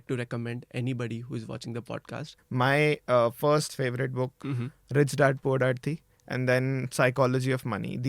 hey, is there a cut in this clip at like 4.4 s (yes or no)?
yes